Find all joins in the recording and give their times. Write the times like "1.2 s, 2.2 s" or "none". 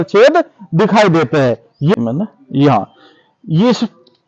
1.9 s